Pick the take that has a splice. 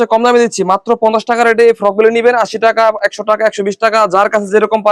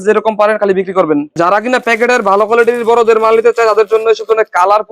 second; 1 cut; at 1.4 s

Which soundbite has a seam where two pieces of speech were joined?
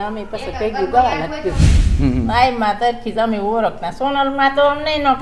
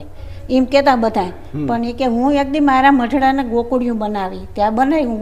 first; 1 cut; at 1.7 s

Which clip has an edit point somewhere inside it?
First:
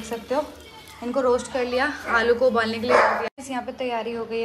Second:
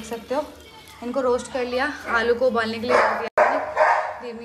first; 1 cut; at 3.3 s

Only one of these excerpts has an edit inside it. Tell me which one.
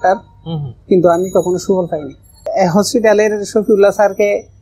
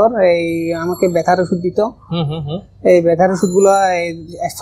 first; 1 cut; at 2.5 s

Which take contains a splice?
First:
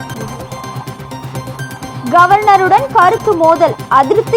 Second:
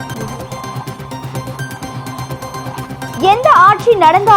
second; 1 cut; at 1.9 s

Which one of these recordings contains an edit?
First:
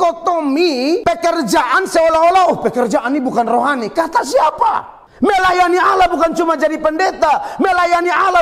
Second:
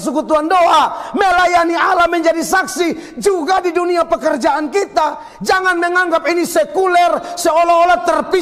first; 2 cuts; at 1.0 s, 5.0 s

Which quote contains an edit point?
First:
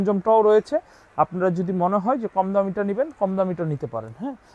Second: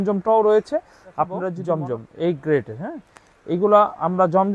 second; 1 cut; at 1.5 s

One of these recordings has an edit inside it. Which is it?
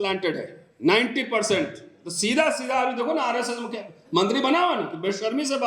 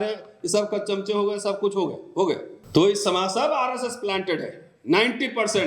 second; 1 cut; at 2.5 s

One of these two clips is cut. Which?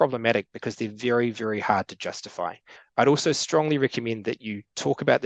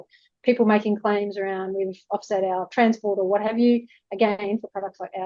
first; 1 cut; at 2.7 s

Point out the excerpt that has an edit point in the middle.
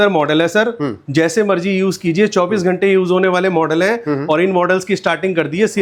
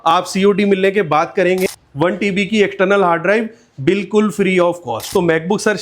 second; 2 cuts; at 1.6 s, 5.1 s

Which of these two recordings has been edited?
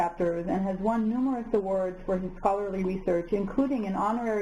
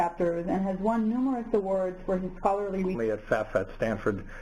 first; 1 cut; at 2.9 s

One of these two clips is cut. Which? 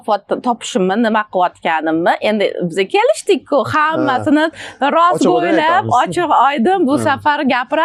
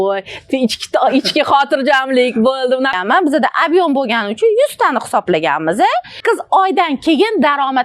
second; 2 cuts; at 3.0 s, 6.1 s

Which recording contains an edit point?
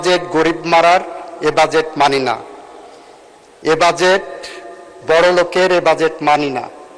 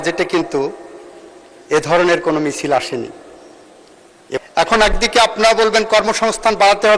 second; 1 cut; at 4.4 s

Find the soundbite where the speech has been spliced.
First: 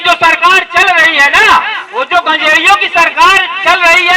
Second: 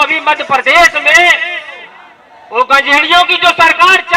first; 1 cut; at 1.8 s

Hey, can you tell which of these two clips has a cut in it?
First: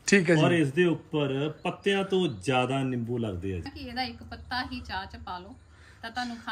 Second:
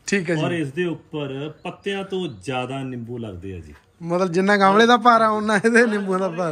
first; 1 cut; at 3.7 s

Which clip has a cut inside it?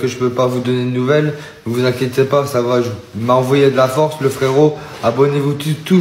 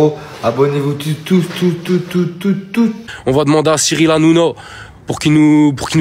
second; 1 cut; at 3.0 s

